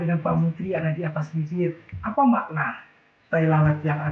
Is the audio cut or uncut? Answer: cut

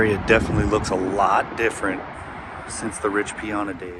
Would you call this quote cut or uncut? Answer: uncut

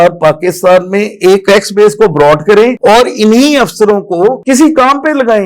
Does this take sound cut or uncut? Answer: cut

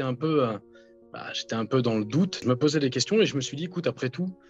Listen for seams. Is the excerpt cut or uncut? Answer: cut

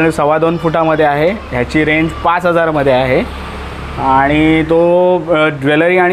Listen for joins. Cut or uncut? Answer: uncut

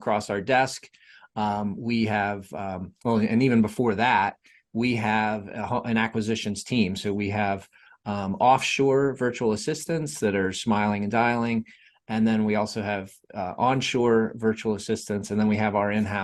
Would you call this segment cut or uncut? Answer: uncut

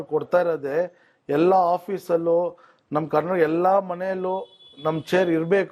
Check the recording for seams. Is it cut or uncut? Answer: uncut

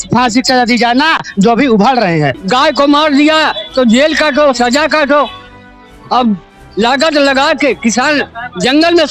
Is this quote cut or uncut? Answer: cut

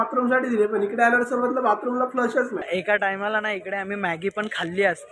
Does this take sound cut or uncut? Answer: cut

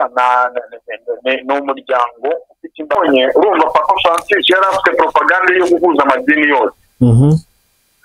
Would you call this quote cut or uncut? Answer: cut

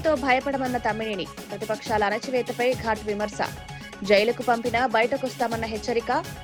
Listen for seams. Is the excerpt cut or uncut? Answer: uncut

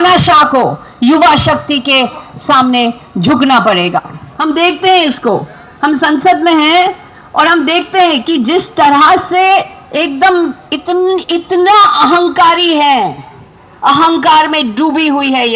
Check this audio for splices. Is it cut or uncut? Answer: cut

